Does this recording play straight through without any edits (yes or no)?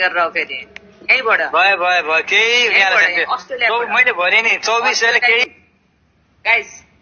no